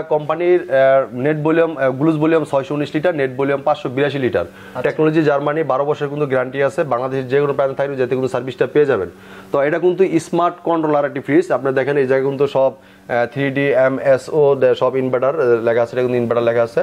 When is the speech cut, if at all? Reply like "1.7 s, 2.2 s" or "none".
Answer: none